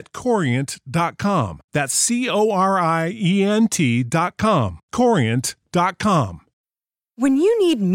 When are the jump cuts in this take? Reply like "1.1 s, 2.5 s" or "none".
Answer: 6.5 s